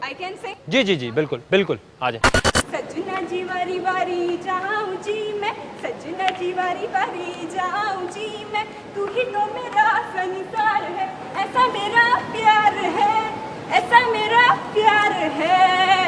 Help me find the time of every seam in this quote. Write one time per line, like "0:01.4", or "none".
0:10.0

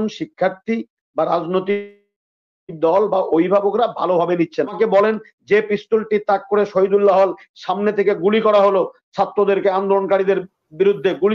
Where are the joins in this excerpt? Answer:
0:04.7

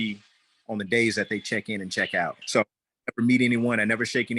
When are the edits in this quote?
0:02.4

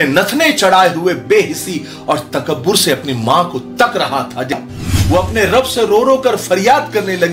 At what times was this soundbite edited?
0:04.5

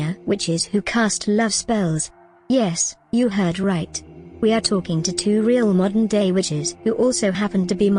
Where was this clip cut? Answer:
0:06.7

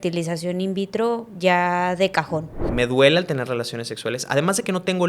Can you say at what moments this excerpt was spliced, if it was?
0:02.6

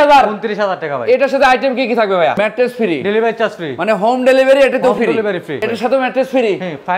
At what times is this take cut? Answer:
0:02.4
0:05.6

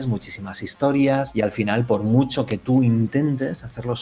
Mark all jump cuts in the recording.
0:01.3

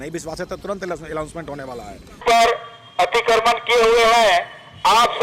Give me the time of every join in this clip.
0:02.1

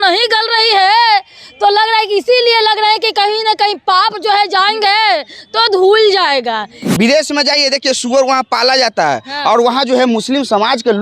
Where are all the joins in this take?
0:06.8

